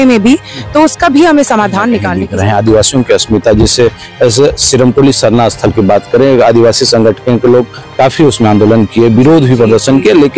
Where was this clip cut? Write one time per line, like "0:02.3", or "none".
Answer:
0:02.2